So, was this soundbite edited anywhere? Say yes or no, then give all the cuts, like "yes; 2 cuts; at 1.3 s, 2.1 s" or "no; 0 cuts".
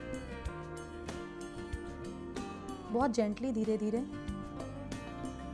no; 0 cuts